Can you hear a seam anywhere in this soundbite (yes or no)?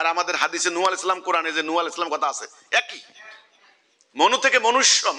no